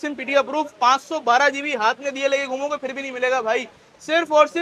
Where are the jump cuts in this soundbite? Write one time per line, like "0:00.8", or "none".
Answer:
none